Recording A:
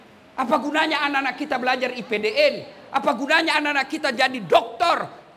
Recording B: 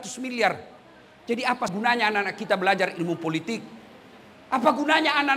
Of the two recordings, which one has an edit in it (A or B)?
B